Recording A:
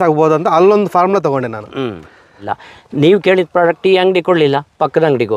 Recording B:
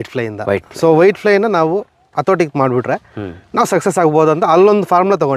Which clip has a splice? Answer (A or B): A